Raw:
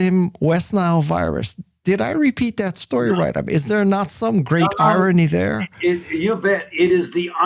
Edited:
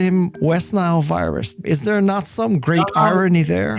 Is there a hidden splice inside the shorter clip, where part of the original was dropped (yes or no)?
yes